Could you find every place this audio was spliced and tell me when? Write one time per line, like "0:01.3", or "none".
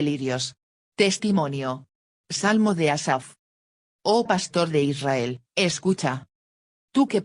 0:03.6
0:05.4